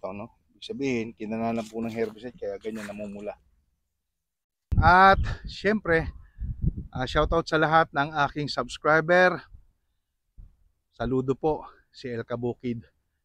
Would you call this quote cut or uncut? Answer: cut